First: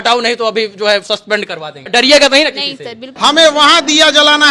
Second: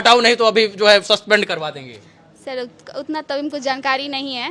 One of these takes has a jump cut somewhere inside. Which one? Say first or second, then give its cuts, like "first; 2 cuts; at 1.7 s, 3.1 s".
first; 2 cuts; at 1.9 s, 3.1 s